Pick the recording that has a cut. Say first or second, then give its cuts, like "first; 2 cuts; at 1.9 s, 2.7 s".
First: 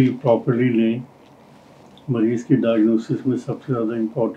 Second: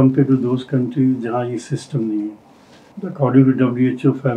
second; 1 cut; at 2.9 s